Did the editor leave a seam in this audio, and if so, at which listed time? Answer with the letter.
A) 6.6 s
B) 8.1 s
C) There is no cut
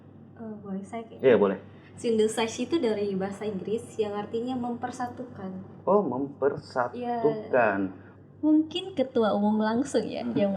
B